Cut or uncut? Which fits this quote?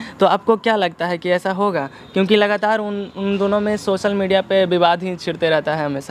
uncut